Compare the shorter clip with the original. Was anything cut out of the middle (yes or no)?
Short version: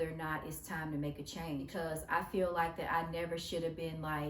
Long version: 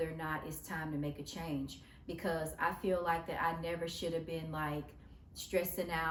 yes